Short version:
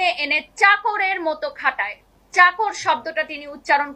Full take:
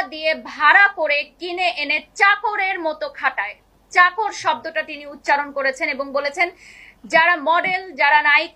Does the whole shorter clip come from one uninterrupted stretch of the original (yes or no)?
yes